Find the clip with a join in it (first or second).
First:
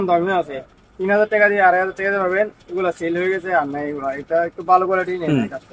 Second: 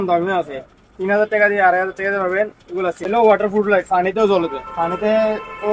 second